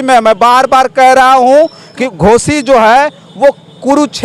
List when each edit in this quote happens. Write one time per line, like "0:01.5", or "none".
0:02.0